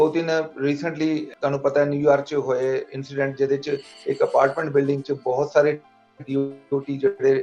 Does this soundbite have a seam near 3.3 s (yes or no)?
no